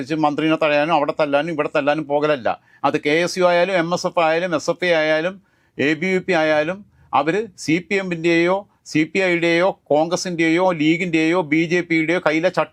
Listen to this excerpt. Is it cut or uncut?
uncut